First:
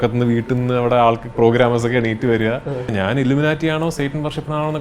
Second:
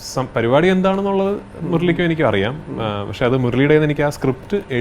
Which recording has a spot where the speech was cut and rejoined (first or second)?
first